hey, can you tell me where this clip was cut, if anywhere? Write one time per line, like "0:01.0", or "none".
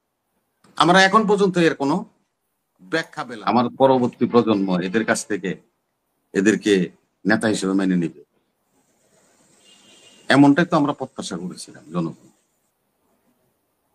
0:03.1